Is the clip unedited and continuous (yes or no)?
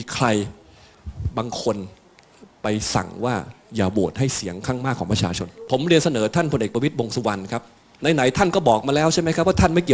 no